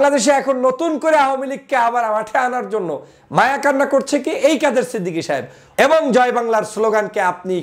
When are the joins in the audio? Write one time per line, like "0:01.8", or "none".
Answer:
0:05.6